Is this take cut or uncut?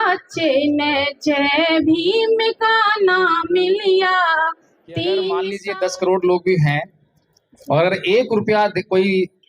cut